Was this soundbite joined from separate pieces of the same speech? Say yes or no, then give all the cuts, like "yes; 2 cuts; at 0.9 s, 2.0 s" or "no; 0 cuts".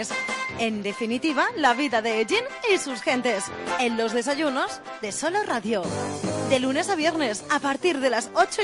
no; 0 cuts